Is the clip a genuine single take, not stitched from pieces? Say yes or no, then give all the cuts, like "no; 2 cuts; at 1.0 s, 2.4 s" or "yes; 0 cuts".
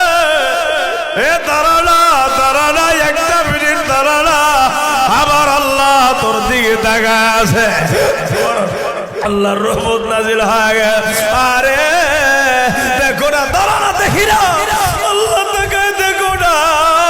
yes; 0 cuts